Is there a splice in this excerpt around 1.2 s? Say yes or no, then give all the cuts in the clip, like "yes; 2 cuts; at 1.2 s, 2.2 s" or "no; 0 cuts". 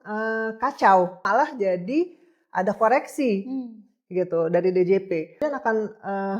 yes; 2 cuts; at 1.2 s, 5.4 s